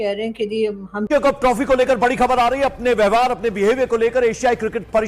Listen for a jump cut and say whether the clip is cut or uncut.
cut